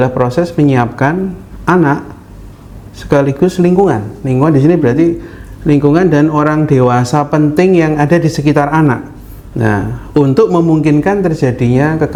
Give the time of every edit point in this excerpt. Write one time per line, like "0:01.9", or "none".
none